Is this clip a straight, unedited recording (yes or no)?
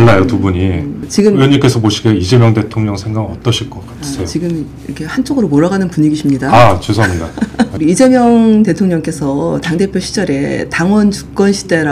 no